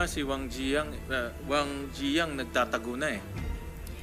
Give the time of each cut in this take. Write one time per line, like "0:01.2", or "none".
none